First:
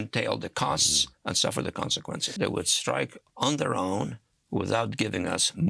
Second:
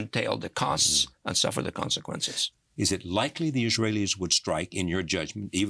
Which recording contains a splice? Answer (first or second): first